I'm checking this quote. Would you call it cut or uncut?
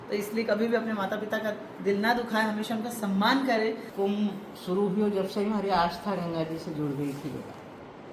cut